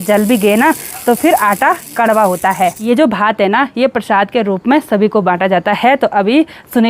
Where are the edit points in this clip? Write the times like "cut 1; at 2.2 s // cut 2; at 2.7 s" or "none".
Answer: cut 1; at 2.8 s